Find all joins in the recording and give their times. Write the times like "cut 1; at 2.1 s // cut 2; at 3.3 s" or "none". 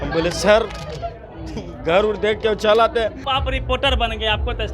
cut 1; at 3.3 s